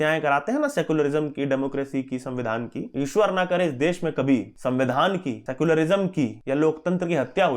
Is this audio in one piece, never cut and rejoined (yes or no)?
no